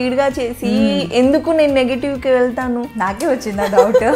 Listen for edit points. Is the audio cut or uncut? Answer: uncut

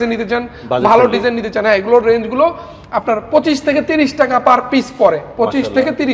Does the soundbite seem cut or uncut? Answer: uncut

